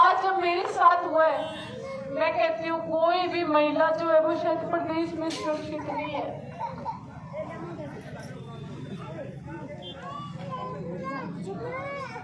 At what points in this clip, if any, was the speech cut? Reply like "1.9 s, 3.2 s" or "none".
none